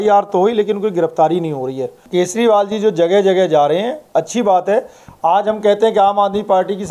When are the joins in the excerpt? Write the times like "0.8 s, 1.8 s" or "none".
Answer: 2.0 s